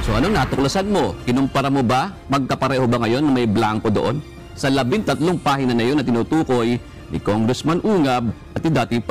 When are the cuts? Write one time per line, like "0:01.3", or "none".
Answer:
none